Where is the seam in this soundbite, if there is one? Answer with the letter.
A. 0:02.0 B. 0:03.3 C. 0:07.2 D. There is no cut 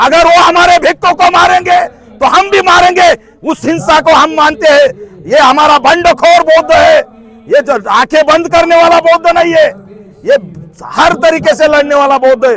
D